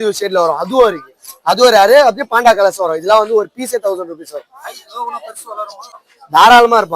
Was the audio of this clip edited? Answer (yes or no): yes